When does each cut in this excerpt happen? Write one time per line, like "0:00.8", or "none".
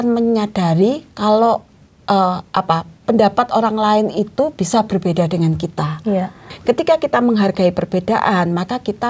0:06.5

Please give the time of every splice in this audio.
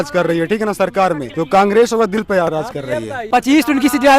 0:01.3
0:03.1

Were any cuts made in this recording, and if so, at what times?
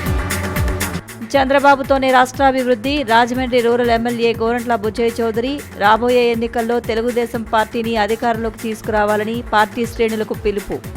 0:00.9

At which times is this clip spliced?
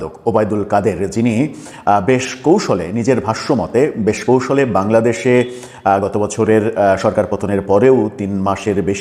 none

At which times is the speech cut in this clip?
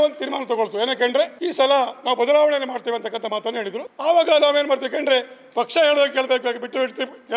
0:01.4
0:03.8

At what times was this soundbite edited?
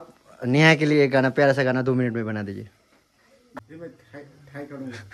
0:03.6

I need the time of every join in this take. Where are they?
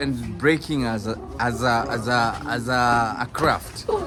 none

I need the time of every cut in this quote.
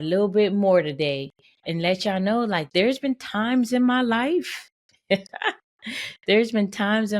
0:01.6
0:02.6

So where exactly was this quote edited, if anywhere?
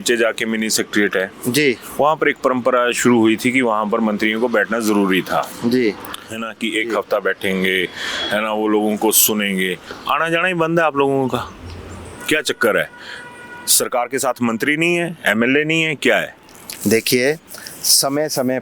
none

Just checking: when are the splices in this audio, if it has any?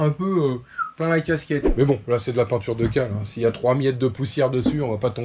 0:01.7

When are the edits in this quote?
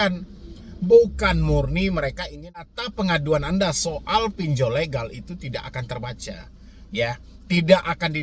0:02.7

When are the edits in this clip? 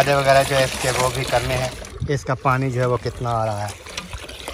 0:01.8

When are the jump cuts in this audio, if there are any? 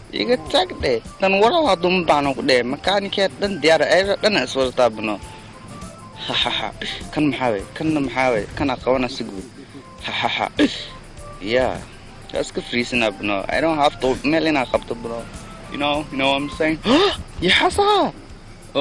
none

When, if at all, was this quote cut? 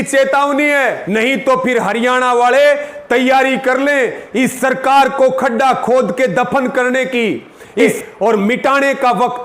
0:01.0
0:07.8

